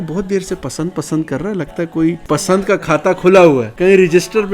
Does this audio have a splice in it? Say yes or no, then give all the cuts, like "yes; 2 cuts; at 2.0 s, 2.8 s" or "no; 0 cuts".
yes; 2 cuts; at 2.2 s, 3.7 s